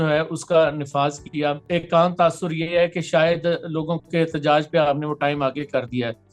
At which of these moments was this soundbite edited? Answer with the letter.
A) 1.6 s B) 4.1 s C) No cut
A